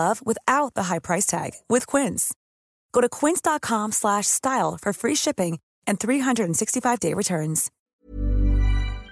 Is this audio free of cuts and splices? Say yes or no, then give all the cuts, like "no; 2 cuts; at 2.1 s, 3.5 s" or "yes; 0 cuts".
no; 1 cut; at 7.7 s